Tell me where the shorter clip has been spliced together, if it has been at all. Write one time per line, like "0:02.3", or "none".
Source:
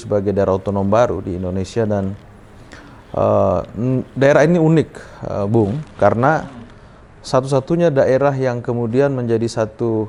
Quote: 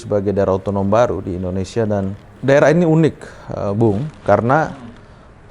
0:02.4